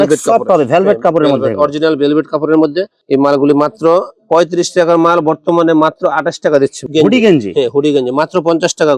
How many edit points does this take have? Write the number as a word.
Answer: two